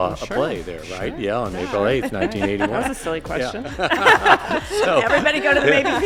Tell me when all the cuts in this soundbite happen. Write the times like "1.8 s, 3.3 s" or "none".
none